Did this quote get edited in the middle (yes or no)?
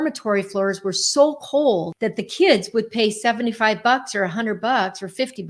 yes